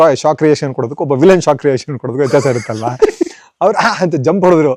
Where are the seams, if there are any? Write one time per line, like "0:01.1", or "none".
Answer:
none

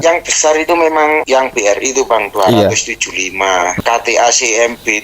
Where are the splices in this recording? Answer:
0:01.2
0:03.8

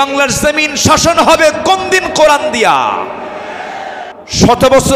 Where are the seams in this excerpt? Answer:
0:04.1

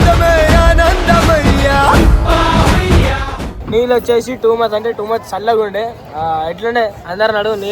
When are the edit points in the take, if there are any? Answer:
0:03.5

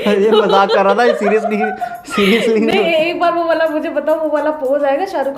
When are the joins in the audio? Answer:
none

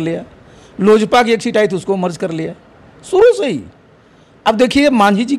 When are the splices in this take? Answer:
none

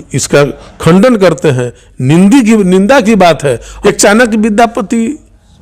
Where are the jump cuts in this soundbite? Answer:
0:03.7

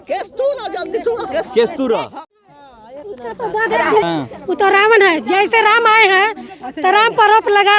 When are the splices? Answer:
0:02.3

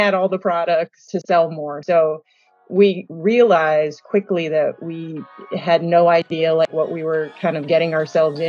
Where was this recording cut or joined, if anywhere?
0:01.1
0:05.4

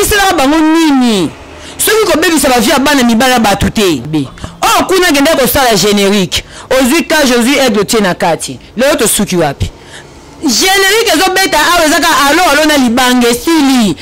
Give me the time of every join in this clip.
0:04.1

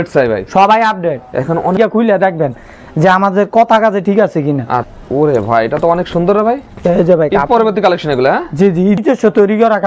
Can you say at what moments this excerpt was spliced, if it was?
0:01.8
0:04.9
0:09.0

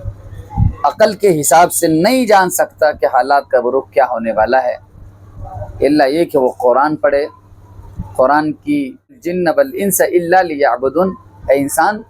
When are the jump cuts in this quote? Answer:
0:09.3

